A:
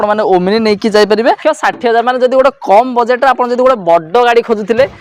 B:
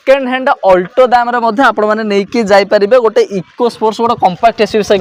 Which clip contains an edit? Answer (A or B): A